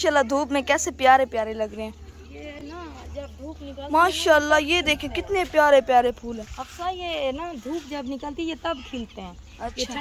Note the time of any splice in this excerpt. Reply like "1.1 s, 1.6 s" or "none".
none